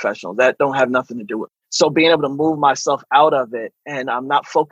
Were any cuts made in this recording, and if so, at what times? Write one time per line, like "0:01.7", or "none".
none